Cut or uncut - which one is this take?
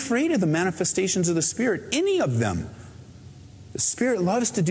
uncut